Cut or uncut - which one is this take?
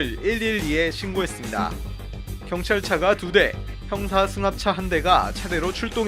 cut